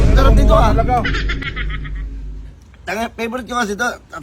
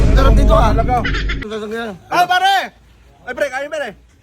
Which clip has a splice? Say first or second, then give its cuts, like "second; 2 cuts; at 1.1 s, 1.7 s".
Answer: second; 1 cut; at 1.4 s